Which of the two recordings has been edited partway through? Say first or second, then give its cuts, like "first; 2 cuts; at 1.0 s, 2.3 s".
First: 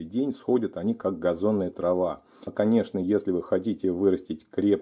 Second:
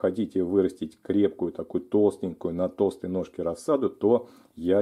first; 1 cut; at 2.5 s